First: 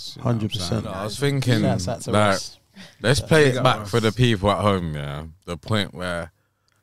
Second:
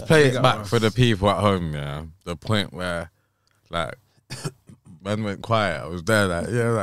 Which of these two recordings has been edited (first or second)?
first